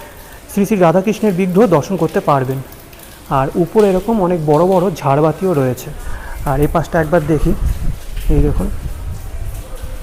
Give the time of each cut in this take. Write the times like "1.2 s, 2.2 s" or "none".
none